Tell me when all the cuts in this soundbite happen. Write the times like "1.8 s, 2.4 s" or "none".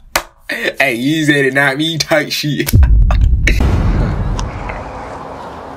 3.6 s